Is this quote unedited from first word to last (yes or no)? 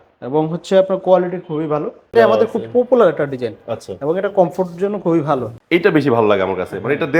no